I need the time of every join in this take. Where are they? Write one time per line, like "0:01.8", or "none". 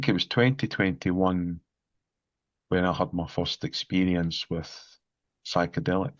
none